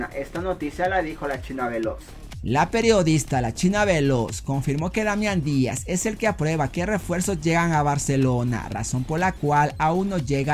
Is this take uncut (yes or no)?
yes